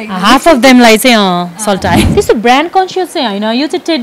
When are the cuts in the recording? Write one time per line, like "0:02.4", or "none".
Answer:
0:02.1